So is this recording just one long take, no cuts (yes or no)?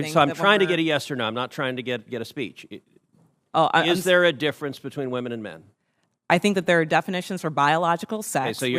yes